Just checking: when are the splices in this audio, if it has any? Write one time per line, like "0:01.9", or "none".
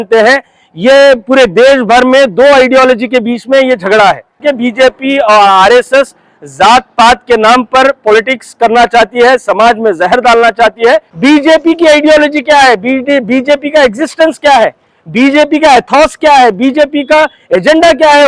0:04.4
0:11.1